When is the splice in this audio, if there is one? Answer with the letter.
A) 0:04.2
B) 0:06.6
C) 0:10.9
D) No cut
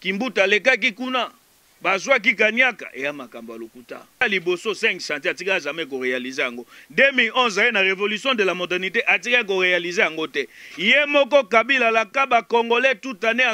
A